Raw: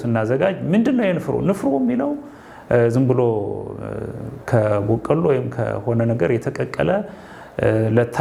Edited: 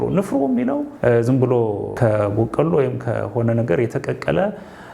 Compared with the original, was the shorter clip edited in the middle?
yes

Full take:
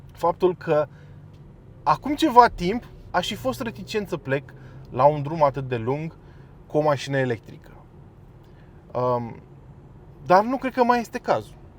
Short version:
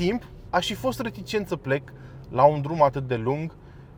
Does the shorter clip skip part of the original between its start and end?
no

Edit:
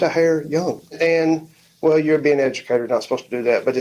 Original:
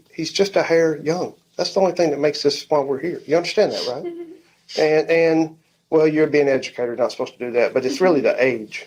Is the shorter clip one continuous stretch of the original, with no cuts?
no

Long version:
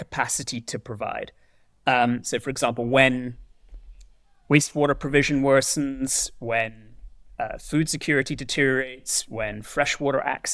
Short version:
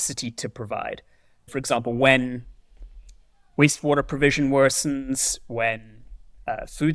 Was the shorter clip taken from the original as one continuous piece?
no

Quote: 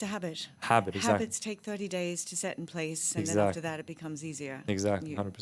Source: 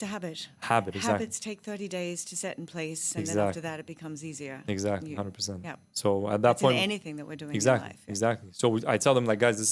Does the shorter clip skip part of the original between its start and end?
no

